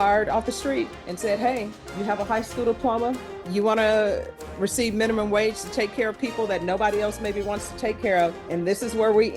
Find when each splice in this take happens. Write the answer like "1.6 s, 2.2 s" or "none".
1.0 s, 1.8 s, 3.3 s, 8.4 s